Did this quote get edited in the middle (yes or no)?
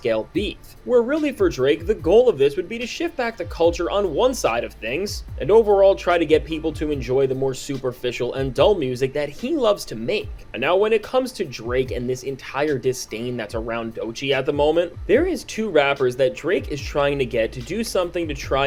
no